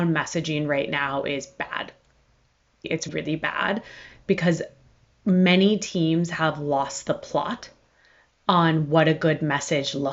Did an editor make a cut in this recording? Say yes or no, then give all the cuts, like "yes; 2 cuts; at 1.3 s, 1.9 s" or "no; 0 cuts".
no; 0 cuts